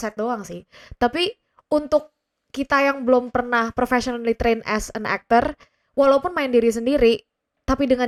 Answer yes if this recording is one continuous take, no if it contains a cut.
yes